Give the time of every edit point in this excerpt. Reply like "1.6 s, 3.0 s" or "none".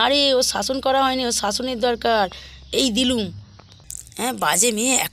none